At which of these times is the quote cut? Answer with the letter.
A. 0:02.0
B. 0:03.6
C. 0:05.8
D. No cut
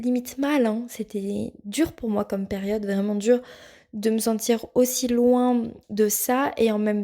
C